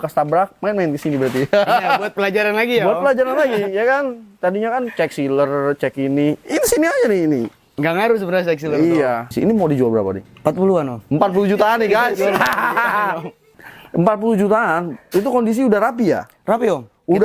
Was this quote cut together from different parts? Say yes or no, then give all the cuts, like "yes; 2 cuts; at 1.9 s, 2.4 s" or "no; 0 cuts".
yes; 2 cuts; at 9.3 s, 13.7 s